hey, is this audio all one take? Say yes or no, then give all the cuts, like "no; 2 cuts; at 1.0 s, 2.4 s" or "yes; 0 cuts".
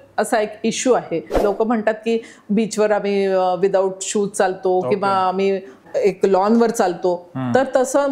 no; 2 cuts; at 1.3 s, 5.8 s